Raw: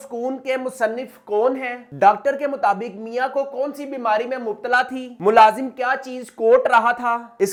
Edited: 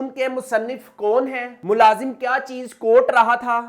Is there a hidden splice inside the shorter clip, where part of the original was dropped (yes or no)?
yes